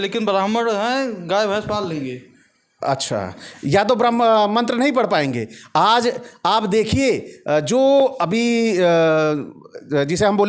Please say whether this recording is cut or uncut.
uncut